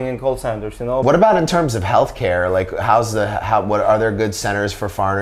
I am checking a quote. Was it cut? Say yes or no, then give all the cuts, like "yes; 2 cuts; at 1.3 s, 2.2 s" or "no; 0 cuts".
yes; 1 cut; at 1.0 s